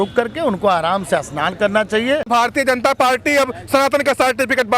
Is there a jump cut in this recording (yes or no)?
yes